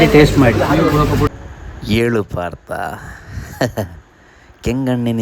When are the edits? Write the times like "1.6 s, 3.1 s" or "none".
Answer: 1.3 s